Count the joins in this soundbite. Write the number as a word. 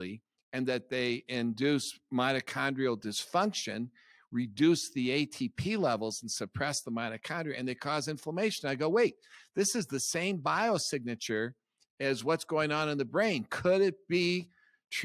zero